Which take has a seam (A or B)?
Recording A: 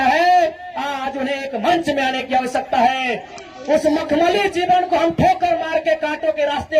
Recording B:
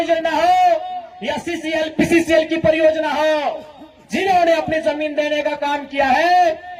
A